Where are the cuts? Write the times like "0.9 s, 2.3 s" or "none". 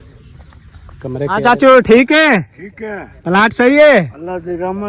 1.4 s